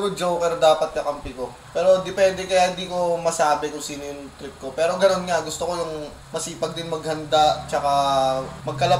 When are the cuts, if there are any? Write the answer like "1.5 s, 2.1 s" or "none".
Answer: none